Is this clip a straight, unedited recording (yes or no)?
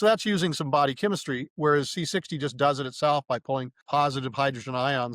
no